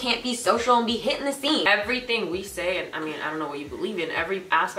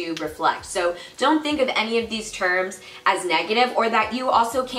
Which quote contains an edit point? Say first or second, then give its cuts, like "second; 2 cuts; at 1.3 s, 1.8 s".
first; 1 cut; at 1.6 s